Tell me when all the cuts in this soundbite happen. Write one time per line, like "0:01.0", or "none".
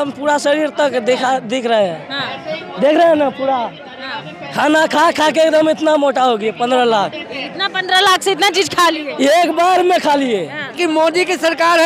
0:10.8